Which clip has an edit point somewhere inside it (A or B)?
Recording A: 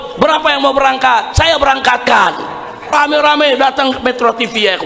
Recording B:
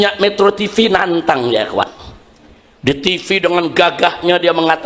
A